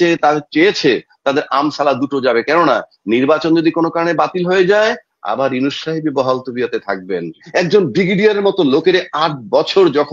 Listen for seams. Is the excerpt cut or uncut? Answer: cut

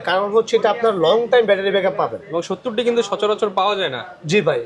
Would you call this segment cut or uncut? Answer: uncut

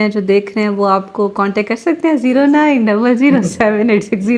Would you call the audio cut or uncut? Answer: uncut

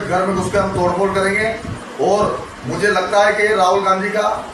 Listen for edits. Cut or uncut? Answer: uncut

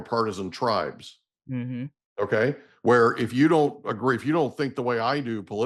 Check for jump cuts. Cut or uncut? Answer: uncut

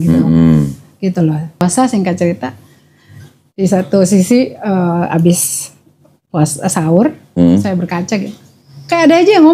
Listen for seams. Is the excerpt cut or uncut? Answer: cut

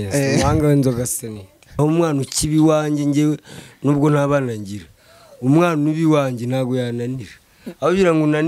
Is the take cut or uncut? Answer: cut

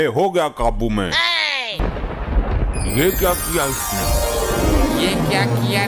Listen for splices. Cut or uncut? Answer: cut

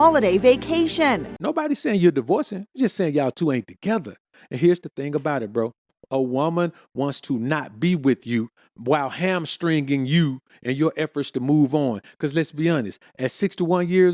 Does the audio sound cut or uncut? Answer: cut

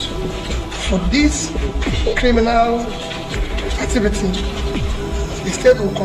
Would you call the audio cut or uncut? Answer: uncut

